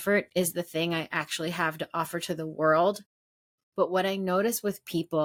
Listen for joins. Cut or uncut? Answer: uncut